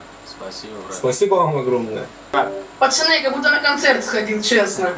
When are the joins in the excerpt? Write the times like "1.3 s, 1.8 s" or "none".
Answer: 2.3 s